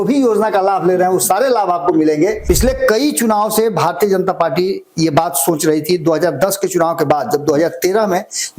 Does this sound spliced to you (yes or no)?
yes